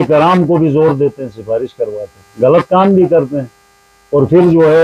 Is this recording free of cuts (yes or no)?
yes